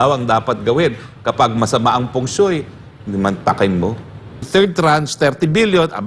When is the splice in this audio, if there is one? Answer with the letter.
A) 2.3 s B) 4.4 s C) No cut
B